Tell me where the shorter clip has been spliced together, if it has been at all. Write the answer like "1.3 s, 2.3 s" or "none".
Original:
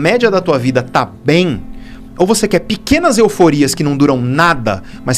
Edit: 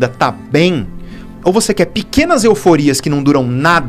none